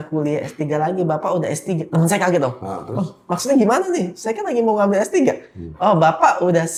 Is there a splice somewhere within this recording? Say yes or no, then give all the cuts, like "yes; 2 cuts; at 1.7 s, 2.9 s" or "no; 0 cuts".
no; 0 cuts